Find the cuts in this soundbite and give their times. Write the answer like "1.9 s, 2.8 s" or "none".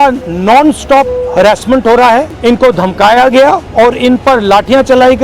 2.3 s, 3.7 s